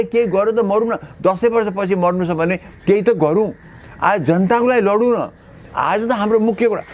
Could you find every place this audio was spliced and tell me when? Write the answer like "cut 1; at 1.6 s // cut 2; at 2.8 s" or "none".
none